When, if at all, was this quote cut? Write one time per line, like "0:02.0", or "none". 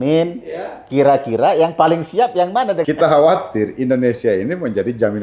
0:02.8